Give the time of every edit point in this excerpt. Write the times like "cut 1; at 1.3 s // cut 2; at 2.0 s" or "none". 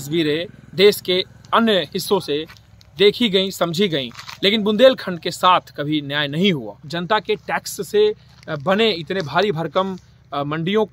cut 1; at 6.9 s